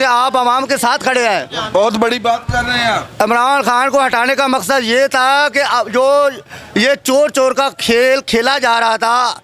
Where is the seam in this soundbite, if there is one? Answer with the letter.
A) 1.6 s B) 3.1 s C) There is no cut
C